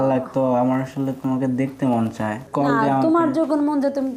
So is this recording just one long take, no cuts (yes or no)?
no